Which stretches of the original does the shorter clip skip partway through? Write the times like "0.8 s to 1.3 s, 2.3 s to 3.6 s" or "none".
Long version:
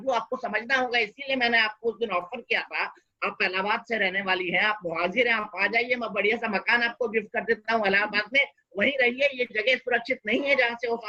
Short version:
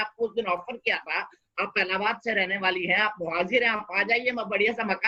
none